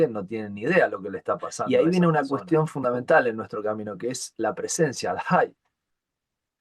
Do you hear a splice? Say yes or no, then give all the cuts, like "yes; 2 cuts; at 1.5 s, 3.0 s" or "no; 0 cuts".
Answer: yes; 1 cut; at 1.5 s